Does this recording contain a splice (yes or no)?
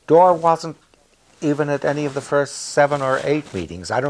no